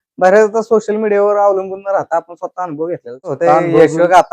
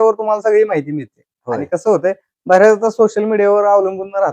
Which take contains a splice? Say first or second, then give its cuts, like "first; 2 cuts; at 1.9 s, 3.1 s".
first; 1 cut; at 3.4 s